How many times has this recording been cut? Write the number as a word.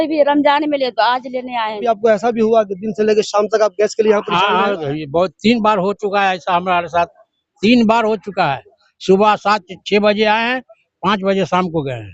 one